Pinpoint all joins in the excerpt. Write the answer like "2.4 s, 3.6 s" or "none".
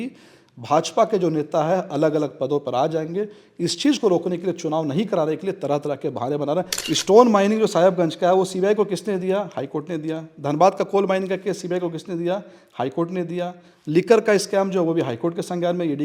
6.7 s